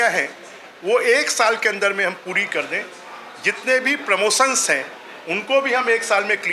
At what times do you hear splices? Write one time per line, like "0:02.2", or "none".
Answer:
none